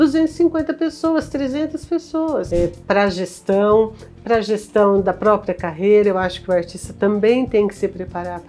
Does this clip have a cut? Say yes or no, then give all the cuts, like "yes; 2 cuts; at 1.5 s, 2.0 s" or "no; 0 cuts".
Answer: yes; 1 cut; at 2.5 s